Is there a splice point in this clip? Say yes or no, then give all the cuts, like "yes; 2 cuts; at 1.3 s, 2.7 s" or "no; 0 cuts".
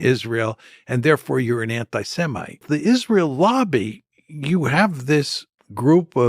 yes; 1 cut; at 2.6 s